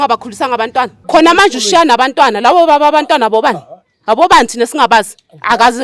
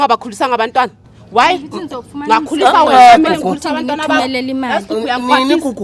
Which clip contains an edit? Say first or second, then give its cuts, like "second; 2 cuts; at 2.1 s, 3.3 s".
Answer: first; 1 cut; at 1.0 s